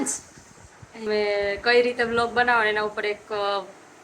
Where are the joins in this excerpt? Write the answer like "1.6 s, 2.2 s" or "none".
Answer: 1.0 s